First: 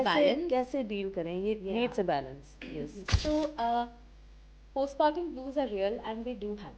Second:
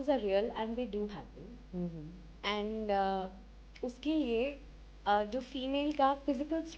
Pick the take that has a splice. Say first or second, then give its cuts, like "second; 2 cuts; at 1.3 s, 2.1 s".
first; 1 cut; at 3.0 s